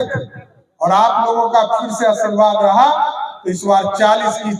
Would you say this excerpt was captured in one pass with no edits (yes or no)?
yes